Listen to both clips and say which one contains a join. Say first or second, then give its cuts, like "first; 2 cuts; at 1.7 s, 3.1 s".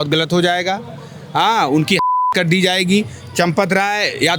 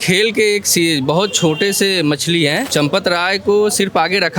second; 1 cut; at 2.7 s